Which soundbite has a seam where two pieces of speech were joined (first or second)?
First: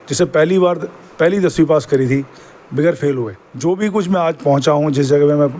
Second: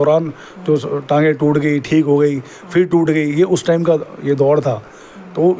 first